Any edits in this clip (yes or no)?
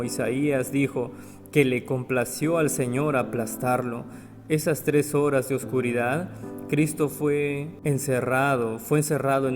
yes